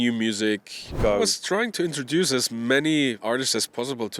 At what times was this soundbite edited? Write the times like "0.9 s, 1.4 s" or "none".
0.9 s, 3.2 s